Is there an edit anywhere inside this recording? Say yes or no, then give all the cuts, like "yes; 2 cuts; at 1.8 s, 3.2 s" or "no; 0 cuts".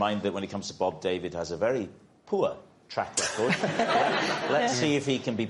no; 0 cuts